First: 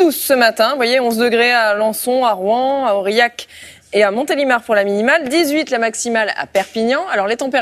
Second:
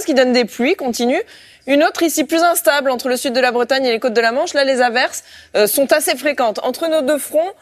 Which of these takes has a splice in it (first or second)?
second